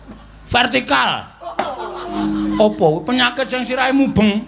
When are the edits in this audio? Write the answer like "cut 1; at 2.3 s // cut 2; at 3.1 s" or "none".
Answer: cut 1; at 2.2 s